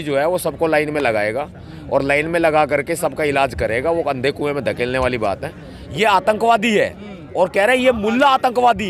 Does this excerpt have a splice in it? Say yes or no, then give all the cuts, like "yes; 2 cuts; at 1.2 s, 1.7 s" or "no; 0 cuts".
yes; 1 cut; at 5.7 s